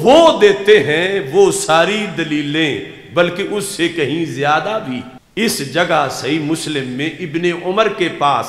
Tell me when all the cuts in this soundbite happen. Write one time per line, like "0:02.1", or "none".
0:05.2